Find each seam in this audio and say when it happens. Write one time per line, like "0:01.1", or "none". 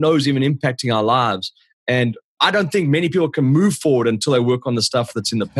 none